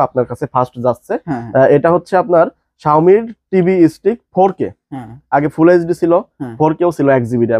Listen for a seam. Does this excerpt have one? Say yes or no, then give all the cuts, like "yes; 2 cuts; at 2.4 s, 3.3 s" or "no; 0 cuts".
no; 0 cuts